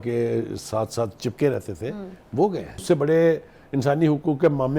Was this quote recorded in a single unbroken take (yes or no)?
no